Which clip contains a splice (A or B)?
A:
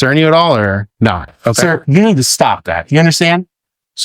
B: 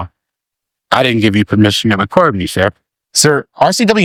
A